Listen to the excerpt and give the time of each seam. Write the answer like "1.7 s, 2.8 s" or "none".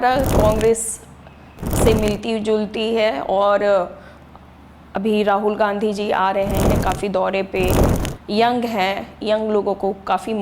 none

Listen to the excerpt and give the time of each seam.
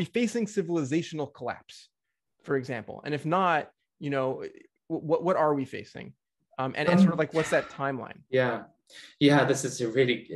none

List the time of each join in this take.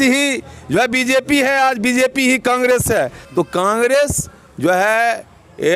none

